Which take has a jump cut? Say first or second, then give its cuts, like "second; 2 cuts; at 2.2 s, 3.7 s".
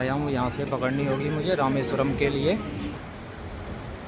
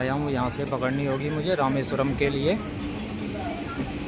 first; 1 cut; at 2.9 s